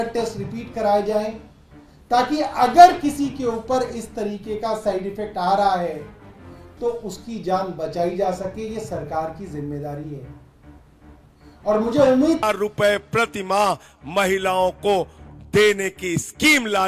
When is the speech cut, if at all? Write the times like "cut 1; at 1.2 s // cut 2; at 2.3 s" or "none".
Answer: cut 1; at 12.4 s